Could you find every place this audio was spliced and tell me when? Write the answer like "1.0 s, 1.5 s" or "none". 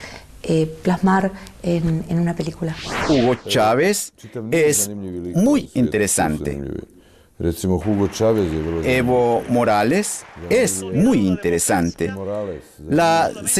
11.4 s

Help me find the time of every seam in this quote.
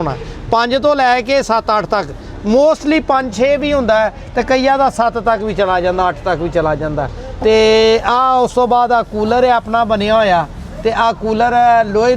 none

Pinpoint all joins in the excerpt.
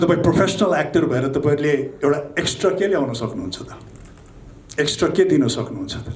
none

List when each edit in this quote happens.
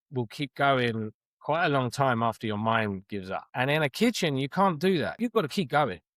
3.5 s, 5.2 s

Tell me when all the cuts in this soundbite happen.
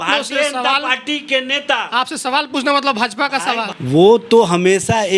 3.7 s

